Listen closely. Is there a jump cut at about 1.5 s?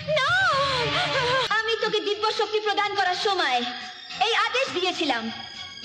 yes; 1 cut; at 1.5 s

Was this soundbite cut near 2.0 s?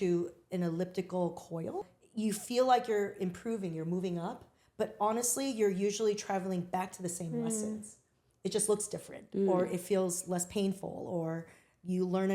yes; 1 cut; at 2.0 s

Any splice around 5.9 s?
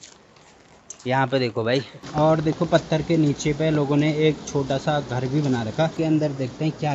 yes; 2 cuts; at 2.1 s, 5.9 s

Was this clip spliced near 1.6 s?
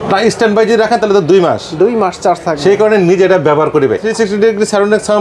no; 1 cut; at 4.0 s

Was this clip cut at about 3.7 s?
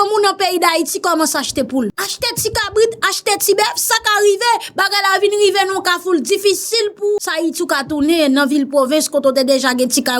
no; 2 cuts; at 2.0 s, 7.3 s

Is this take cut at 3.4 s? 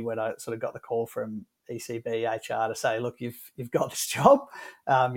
no; 0 cuts

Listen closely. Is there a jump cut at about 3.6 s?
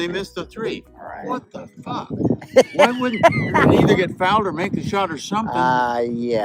yes; 1 cut; at 3.6 s

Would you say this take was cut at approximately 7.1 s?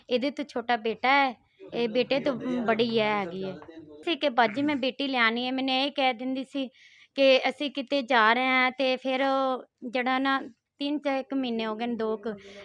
no; 1 cut; at 4.0 s

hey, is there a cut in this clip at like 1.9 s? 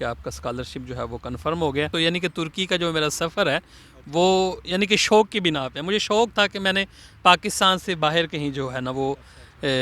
yes; 1 cut; at 1.9 s

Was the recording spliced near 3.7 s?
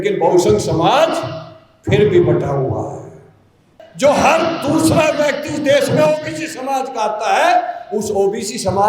yes; 1 cut; at 3.7 s

